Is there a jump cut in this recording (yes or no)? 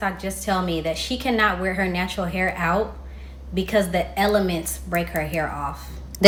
no